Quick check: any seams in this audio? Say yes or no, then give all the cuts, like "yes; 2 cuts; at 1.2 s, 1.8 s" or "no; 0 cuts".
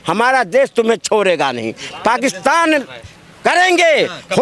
no; 0 cuts